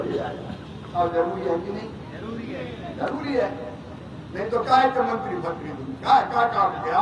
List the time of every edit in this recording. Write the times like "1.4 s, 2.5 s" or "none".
0.9 s